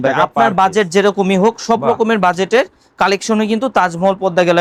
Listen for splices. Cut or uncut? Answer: uncut